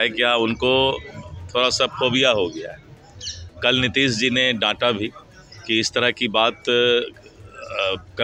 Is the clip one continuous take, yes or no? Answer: yes